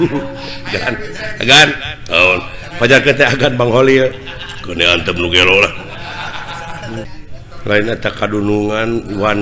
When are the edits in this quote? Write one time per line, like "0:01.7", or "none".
0:07.1